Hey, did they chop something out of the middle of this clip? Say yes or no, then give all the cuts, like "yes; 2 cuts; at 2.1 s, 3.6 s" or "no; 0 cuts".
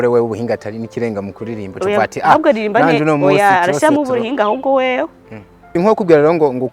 yes; 1 cut; at 5.7 s